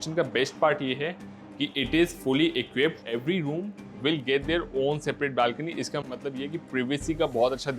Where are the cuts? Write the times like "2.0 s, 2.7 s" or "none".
3.0 s